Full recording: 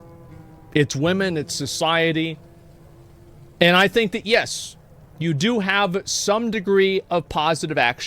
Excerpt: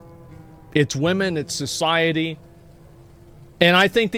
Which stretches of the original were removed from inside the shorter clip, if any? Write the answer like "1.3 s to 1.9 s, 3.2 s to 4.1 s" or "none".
none